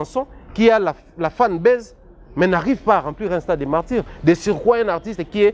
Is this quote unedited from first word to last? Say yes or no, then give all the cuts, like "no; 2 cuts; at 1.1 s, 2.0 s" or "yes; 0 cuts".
yes; 0 cuts